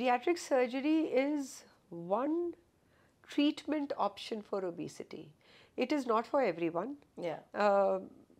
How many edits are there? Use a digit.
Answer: 0